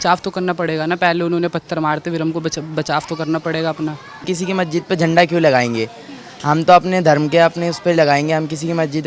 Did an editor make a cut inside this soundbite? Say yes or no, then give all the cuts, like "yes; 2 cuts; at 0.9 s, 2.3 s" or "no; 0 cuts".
yes; 1 cut; at 4.2 s